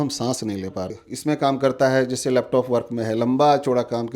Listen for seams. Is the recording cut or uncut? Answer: cut